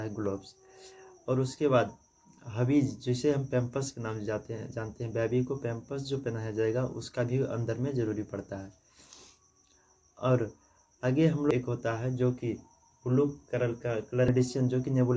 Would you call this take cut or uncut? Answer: cut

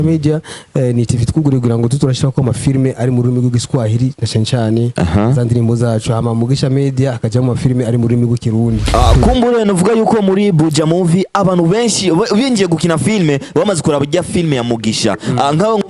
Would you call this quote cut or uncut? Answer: cut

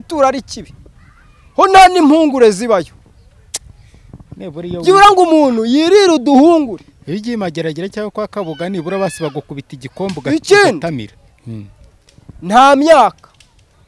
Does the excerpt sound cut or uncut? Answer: uncut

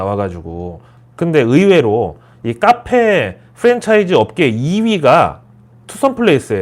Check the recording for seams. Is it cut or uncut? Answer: cut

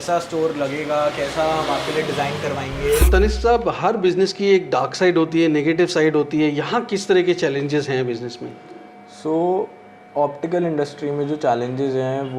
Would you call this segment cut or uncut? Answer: cut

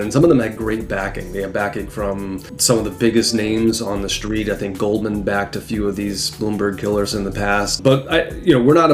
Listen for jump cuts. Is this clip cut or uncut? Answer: cut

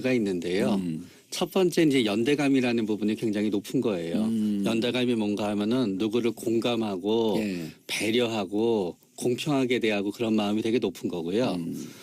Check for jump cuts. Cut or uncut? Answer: cut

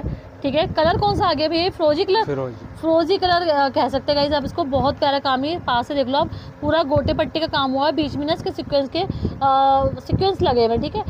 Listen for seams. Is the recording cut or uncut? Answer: uncut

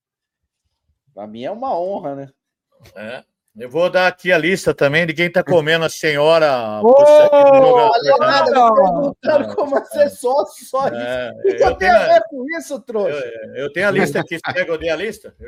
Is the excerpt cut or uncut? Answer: uncut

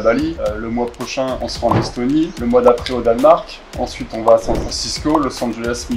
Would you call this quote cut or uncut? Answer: uncut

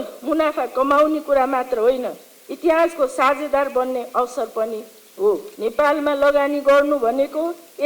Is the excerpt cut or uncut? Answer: cut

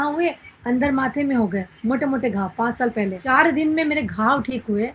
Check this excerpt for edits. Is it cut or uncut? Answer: cut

